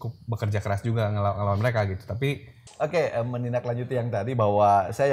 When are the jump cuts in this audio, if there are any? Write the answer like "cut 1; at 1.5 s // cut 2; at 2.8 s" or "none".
cut 1; at 2.6 s